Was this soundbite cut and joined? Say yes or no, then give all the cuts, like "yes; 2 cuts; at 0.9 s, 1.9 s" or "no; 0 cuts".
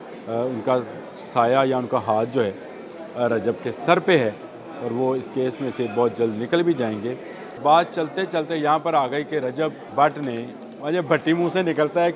yes; 2 cuts; at 7.6 s, 9.8 s